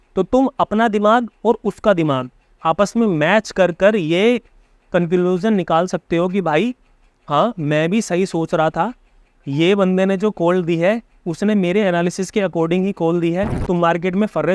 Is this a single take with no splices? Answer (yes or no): no